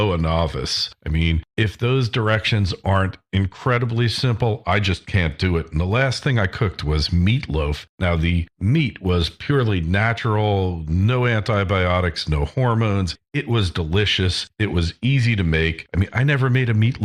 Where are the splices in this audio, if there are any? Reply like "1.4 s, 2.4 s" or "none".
13.6 s